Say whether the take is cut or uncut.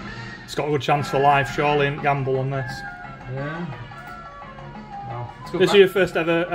uncut